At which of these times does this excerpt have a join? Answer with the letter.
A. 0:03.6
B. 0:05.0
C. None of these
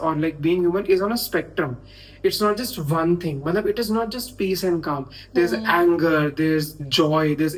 C